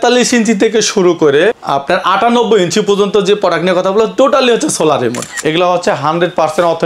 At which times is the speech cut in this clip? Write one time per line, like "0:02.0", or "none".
0:01.6
0:05.3